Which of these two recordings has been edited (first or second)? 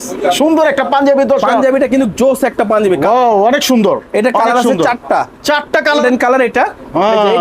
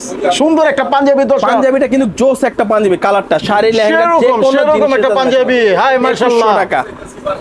first